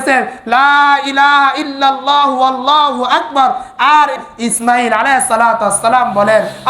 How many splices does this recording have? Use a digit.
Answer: 1